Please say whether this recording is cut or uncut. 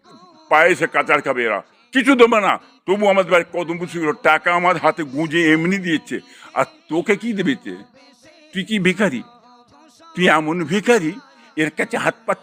uncut